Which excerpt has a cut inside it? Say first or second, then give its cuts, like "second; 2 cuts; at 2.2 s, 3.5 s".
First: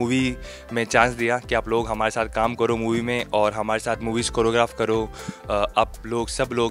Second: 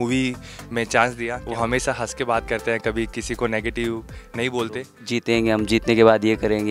second; 2 cuts; at 1.3 s, 4.9 s